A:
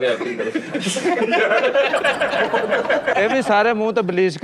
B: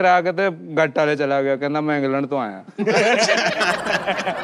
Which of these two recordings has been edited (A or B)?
A